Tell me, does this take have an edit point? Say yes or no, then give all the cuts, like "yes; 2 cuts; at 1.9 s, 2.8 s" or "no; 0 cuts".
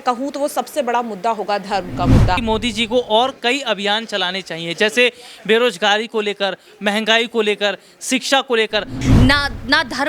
yes; 2 cuts; at 2.4 s, 9.0 s